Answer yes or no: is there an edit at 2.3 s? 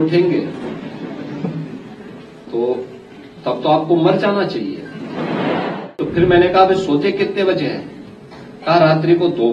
no